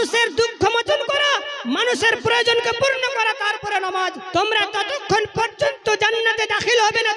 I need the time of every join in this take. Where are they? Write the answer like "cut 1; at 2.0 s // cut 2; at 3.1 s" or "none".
cut 1; at 4.2 s